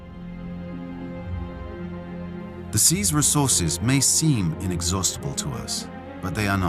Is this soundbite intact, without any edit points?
yes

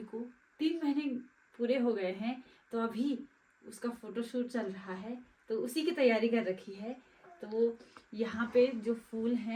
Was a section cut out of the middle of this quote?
no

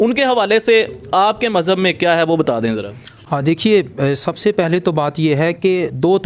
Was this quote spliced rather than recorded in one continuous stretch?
no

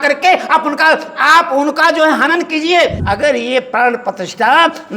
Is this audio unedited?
no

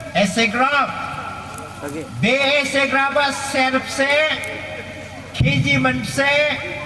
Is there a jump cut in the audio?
no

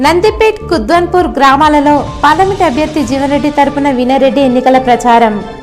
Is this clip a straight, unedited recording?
yes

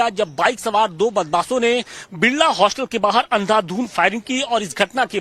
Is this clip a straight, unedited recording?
no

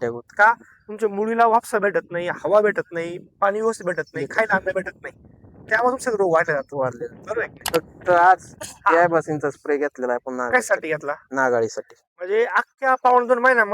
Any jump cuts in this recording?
yes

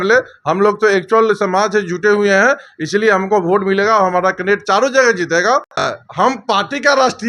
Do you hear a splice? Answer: yes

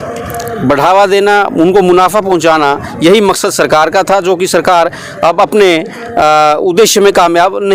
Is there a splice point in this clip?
no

